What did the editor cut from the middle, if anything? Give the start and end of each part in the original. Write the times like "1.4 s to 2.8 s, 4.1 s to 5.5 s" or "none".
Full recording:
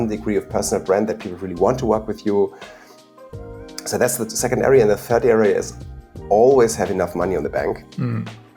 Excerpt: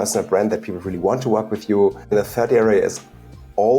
2.7 s to 4.8 s

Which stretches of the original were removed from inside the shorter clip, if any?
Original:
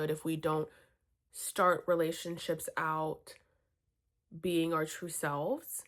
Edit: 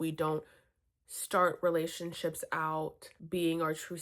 3.3 s to 4.2 s

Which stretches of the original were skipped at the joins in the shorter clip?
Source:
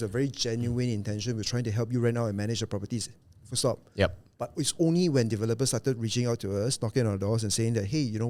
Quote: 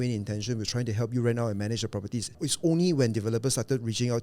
3.1 s to 4.5 s

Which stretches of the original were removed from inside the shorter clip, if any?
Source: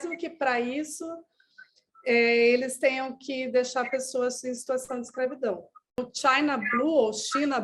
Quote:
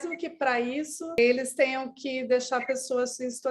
1.2 s to 2.4 s

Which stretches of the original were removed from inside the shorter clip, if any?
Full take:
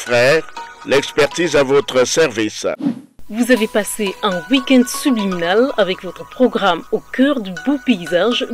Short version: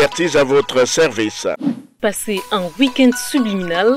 3.2 s to 3.7 s

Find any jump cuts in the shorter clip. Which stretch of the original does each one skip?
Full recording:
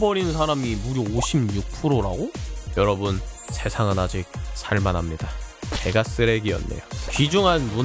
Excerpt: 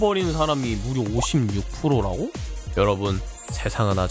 none

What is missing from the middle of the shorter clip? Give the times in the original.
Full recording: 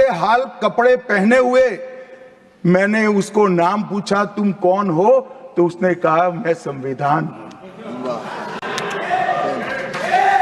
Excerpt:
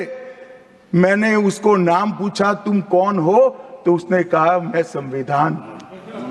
none

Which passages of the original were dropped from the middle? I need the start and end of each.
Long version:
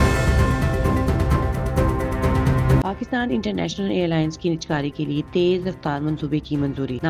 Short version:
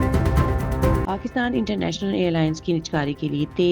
2.0 s to 2.8 s

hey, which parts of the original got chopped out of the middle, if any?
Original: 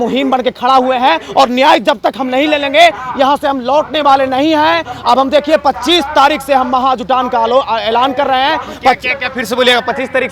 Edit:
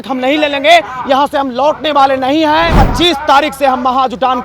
4.9 s to 5.7 s

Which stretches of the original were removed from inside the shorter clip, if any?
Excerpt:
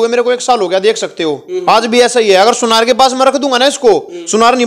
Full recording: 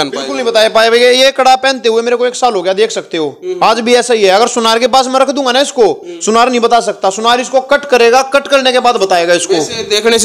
none

